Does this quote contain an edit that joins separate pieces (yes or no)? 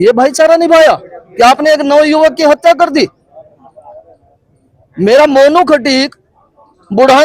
no